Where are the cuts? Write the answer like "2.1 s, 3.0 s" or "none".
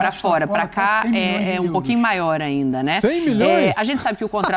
none